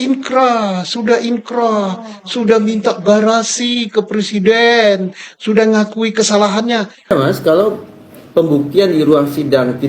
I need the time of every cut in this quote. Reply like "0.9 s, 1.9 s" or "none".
7.1 s